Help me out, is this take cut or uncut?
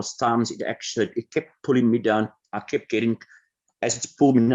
uncut